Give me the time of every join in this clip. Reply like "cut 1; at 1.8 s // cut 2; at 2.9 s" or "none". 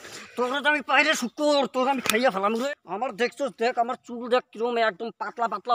cut 1; at 2.6 s